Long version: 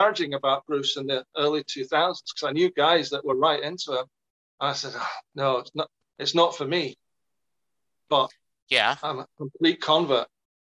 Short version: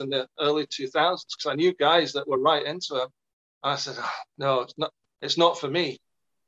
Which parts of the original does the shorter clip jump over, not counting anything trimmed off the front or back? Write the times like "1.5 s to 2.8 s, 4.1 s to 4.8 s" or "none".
none